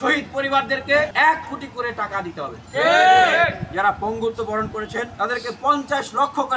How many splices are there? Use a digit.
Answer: 2